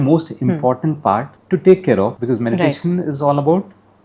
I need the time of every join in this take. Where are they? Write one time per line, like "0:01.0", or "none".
0:01.3
0:02.2